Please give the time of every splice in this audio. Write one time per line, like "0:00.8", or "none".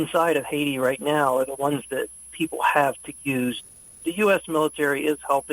0:03.6